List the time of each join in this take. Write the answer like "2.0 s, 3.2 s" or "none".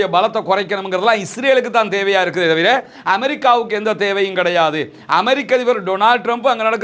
none